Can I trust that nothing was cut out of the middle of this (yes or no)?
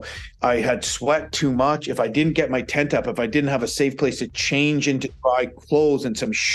yes